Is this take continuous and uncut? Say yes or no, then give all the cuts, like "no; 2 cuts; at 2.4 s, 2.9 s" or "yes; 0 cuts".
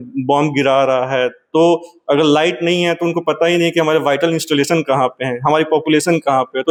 yes; 0 cuts